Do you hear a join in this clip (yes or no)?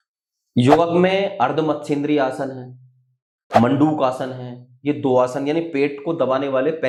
no